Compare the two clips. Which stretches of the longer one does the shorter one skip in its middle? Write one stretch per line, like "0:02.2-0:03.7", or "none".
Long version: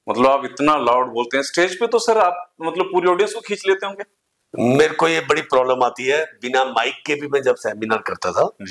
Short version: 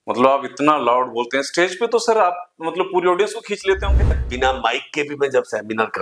0:04.2-0:06.4